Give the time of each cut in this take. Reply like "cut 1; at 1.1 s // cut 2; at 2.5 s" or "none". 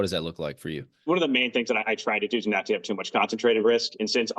cut 1; at 1.0 s